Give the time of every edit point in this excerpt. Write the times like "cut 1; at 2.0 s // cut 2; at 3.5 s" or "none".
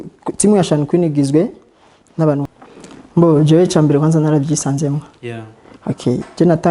cut 1; at 2.5 s